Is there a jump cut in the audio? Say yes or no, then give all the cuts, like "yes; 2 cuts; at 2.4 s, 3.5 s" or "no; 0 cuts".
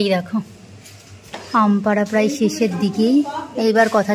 no; 0 cuts